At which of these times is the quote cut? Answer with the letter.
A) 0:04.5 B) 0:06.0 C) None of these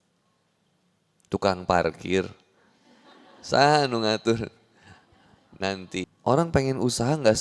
B